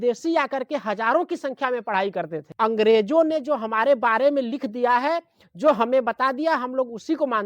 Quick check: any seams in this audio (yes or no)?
no